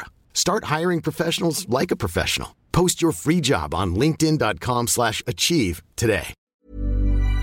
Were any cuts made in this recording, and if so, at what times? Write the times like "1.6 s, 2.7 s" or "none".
6.4 s

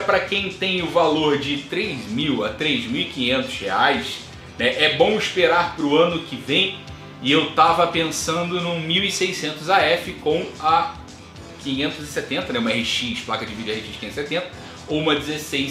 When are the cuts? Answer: none

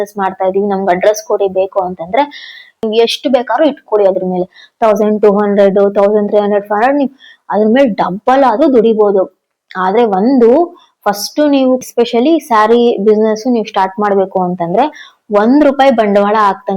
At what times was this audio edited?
2.8 s, 11.9 s

